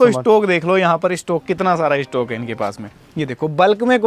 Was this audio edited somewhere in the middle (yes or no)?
no